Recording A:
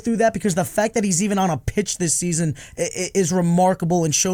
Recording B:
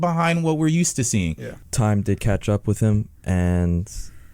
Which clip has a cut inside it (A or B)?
B